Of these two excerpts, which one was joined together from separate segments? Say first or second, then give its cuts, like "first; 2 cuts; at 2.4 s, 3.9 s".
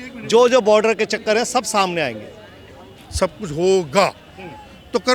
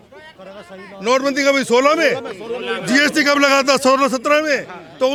first; 1 cut; at 3.0 s